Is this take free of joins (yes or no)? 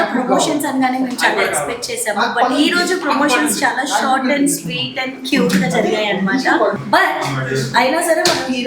yes